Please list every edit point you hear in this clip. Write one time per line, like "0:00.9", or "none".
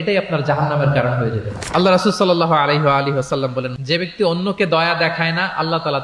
0:03.7